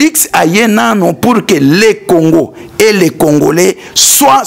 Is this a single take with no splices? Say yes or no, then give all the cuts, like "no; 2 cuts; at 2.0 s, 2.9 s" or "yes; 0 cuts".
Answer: yes; 0 cuts